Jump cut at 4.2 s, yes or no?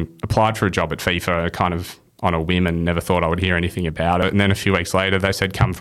yes